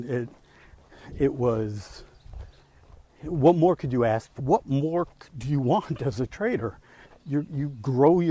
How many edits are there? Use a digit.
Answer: 1